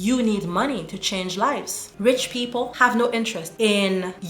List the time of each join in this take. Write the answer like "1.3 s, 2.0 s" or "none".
1.8 s